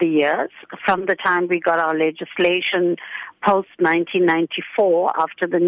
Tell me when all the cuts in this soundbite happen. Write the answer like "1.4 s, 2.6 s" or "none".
none